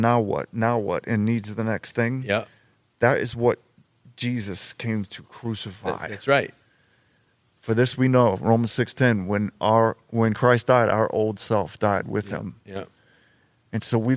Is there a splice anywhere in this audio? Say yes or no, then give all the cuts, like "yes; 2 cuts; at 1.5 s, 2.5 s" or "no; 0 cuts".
no; 0 cuts